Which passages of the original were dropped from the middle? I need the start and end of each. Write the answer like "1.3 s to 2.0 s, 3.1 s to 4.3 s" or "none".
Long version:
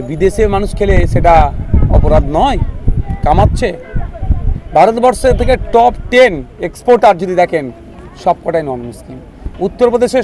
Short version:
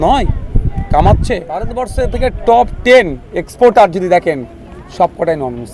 4.1 s to 5.1 s